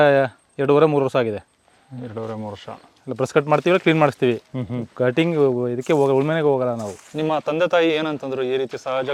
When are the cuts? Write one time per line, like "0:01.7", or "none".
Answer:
none